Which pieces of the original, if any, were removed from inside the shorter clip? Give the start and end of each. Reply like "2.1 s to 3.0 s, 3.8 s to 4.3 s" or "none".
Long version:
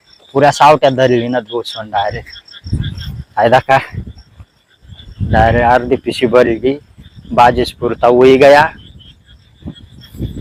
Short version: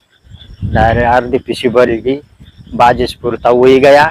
none